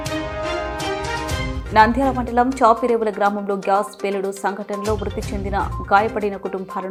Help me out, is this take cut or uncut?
uncut